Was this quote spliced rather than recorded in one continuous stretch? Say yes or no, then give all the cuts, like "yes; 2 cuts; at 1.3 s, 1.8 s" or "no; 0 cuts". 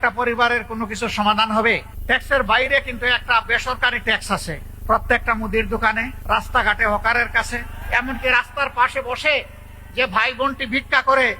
yes; 4 cuts; at 1.9 s, 4.7 s, 6.1 s, 7.8 s